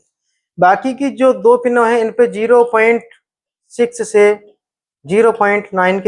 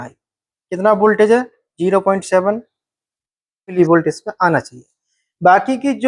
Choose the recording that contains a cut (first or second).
second